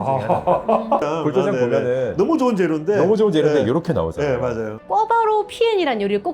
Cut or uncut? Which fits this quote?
cut